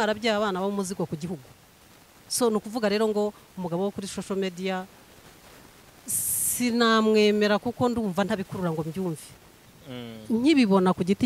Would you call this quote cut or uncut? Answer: cut